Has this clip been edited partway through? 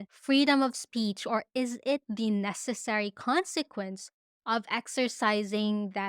no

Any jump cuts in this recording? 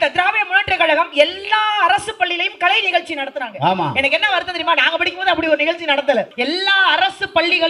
yes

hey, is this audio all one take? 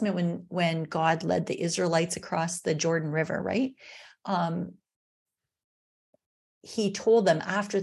yes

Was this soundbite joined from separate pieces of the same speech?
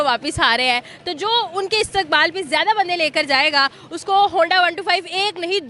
no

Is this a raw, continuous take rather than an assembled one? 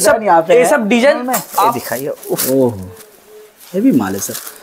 no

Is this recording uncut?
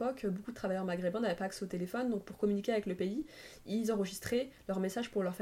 yes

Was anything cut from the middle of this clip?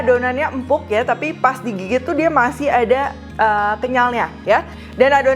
no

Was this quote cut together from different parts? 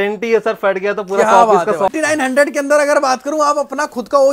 yes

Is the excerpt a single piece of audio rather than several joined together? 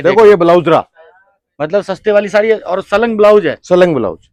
yes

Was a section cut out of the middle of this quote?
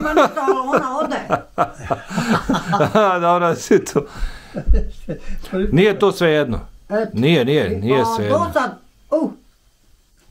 no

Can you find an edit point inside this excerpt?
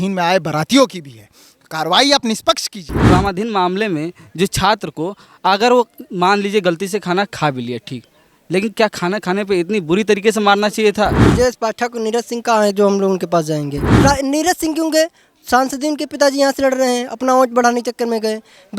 yes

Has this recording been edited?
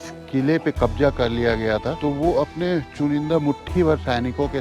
no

